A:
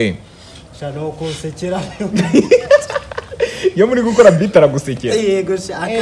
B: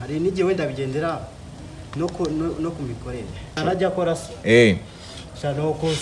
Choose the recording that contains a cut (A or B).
B